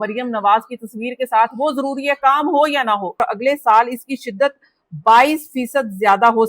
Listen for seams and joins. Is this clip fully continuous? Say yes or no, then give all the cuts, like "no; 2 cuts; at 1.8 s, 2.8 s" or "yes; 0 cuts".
no; 1 cut; at 3.2 s